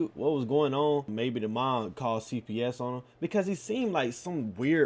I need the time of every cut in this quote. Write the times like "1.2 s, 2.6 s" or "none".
1.1 s

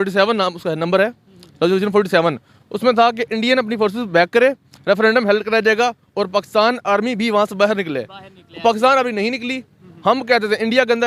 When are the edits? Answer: none

